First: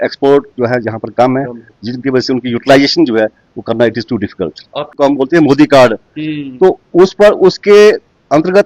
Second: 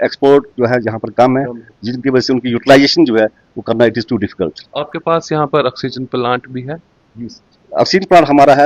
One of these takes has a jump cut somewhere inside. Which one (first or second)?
first